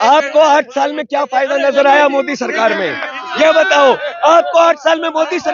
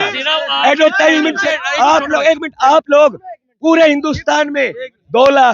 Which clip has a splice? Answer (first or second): second